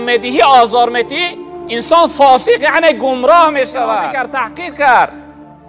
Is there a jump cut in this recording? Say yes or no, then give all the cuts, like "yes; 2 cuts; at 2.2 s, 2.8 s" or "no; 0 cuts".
yes; 1 cut; at 4.2 s